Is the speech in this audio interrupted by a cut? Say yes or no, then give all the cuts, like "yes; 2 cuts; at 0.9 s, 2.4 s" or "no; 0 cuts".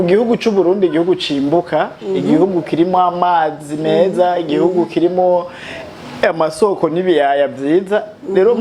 no; 0 cuts